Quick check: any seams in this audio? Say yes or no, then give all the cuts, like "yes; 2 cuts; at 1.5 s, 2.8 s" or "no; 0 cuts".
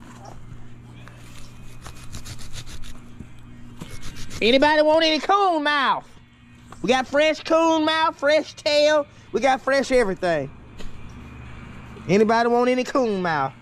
no; 0 cuts